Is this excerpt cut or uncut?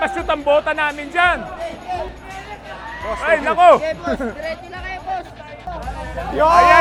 uncut